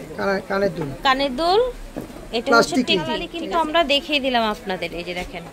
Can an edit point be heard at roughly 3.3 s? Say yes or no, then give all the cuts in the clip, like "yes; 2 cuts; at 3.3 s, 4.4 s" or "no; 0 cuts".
yes; 1 cut; at 3.3 s